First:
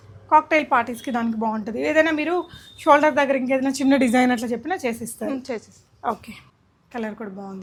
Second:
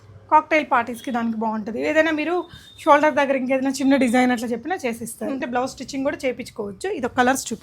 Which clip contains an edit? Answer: second; 1 cut; at 5.4 s

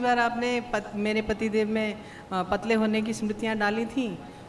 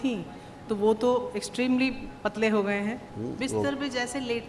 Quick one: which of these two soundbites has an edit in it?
second; 1 cut; at 3.1 s

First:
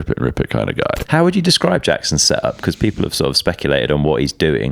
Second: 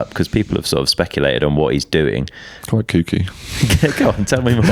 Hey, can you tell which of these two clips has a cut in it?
first; 1 cut; at 1.0 s

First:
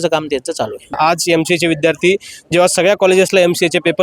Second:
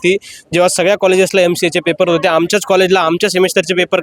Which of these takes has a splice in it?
first; 1 cut; at 1.0 s

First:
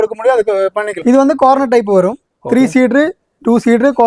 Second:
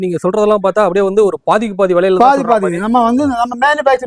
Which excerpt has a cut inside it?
first; 1 cut; at 0.9 s

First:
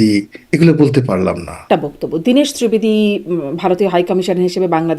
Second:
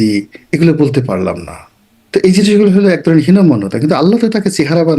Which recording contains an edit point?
first; 1 cut; at 1.6 s

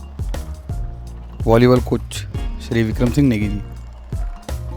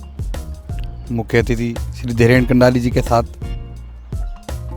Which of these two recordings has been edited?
first; 2 cuts; at 1.1 s, 3.7 s

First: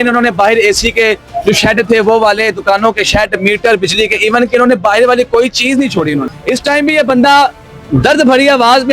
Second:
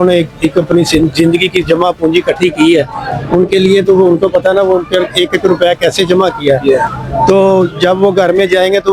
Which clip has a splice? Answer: first; 1 cut; at 6.3 s

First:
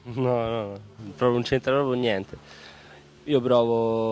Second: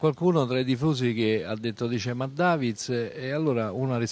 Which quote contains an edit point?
second; 1 cut; at 2.8 s

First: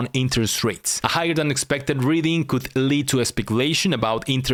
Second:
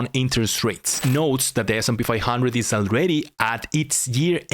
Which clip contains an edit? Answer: second; 1 cut; at 1.0 s

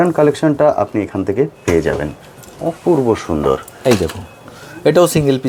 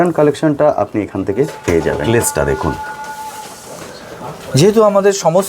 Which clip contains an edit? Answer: second; 1 cut; at 2.0 s

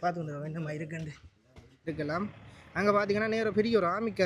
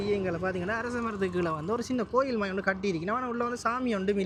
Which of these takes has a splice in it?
first; 1 cut; at 1.9 s

